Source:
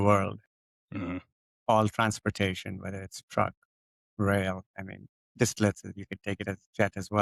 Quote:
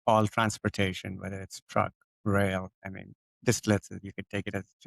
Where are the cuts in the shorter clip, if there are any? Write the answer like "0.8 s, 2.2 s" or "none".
2.1 s